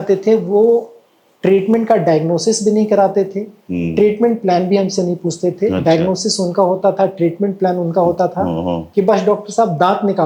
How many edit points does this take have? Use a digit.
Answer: 0